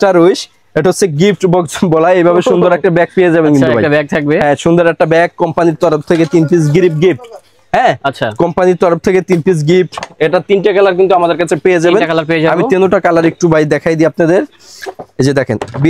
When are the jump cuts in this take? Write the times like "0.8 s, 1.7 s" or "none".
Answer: none